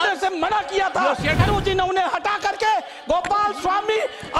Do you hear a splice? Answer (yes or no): yes